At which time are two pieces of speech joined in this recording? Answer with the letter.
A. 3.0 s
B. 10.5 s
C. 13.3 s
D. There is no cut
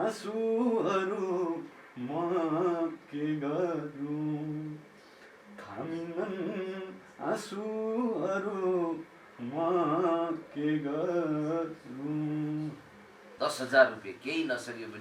C